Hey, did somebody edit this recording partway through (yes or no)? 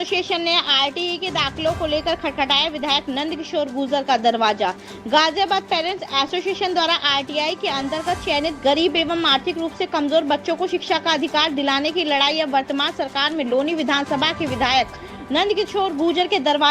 no